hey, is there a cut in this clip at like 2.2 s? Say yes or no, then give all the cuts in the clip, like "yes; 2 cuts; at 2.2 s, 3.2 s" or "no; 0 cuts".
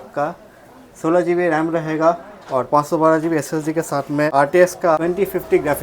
no; 2 cuts; at 4.3 s, 5.0 s